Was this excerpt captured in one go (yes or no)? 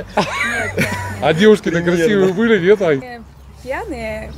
no